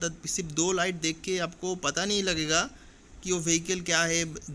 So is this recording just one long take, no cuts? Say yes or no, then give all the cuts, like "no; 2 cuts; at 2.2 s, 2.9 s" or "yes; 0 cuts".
yes; 0 cuts